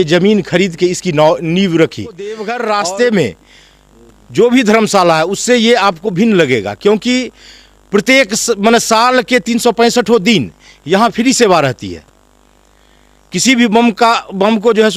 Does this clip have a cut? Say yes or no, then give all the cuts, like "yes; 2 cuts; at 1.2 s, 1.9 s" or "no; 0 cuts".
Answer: yes; 1 cut; at 2.5 s